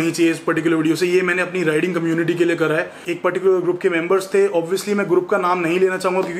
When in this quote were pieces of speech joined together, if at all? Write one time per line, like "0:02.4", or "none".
0:03.0

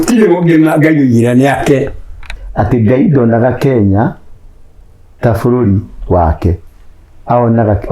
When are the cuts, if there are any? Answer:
0:02.4

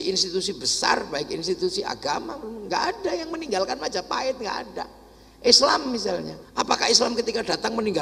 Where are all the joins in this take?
0:06.4

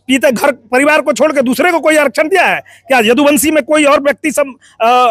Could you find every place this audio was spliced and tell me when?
none

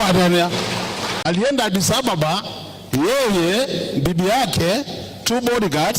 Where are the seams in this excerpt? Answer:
0:01.1

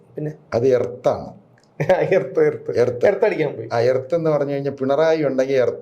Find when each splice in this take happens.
none

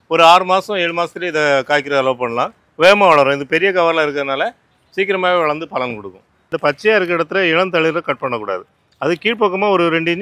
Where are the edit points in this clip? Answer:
0:06.5

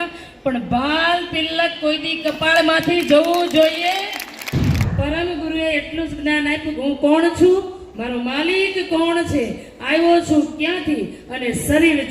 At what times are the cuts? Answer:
0:04.8

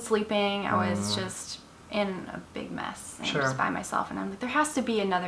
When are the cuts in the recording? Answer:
none

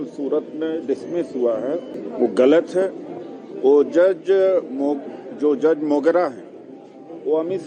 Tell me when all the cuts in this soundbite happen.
0:02.0

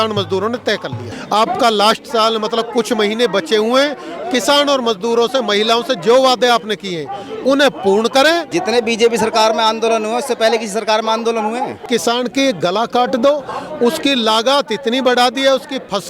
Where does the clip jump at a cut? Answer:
0:01.1
0:08.5
0:11.8

